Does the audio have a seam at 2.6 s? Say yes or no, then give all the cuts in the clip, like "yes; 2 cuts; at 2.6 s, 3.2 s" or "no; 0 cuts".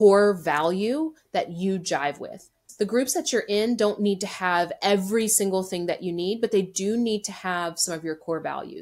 yes; 1 cut; at 2.6 s